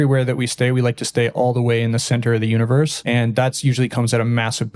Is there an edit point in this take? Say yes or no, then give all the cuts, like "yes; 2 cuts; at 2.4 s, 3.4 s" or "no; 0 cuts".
no; 0 cuts